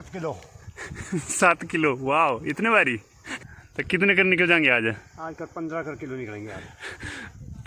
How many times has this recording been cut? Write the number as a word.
zero